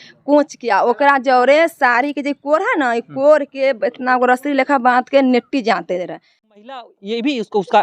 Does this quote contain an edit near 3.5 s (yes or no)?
no